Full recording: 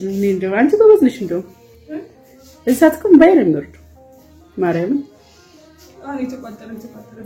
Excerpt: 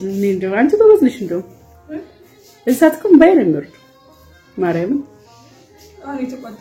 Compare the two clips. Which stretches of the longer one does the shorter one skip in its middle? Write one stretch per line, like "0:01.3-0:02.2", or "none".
none